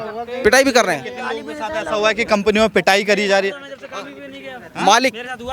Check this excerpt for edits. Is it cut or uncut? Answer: uncut